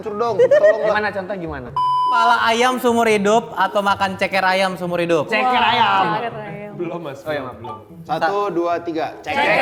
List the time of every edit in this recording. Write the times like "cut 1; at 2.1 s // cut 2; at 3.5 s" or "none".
cut 1; at 2.0 s